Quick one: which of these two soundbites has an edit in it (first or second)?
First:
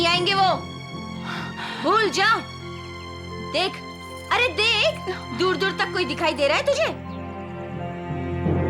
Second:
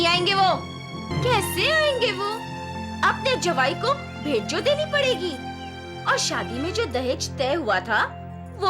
second